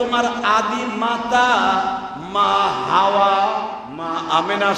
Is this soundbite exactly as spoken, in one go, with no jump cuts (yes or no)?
no